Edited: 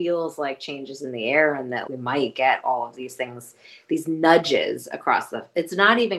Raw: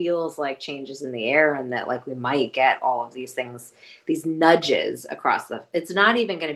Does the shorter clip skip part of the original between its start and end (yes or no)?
yes